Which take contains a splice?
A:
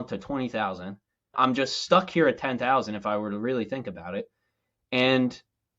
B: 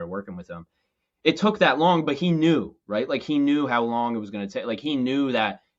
A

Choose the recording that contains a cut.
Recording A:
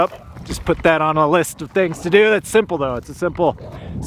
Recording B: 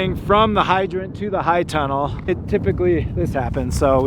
B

